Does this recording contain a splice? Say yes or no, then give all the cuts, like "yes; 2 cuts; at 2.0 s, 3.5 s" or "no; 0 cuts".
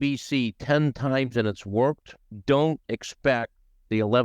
no; 0 cuts